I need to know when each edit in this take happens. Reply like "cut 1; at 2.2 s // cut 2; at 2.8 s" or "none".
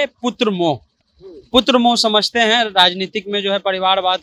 none